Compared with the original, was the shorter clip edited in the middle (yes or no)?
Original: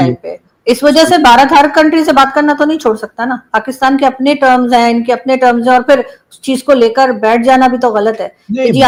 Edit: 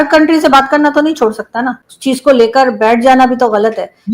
yes